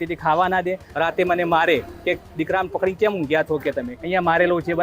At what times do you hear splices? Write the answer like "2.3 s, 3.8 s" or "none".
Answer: 0.8 s, 3.9 s